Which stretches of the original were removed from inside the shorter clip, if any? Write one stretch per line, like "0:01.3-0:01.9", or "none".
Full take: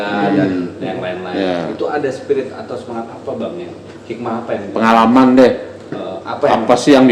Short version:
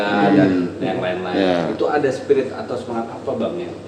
none